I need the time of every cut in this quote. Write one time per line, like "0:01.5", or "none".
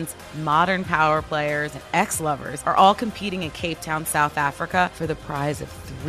0:02.1
0:04.9